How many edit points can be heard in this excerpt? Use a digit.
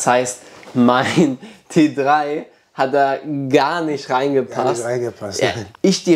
1